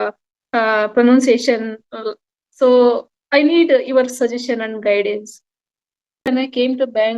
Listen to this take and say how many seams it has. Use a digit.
1